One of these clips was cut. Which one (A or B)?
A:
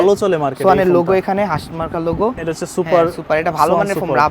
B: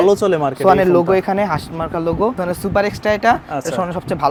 A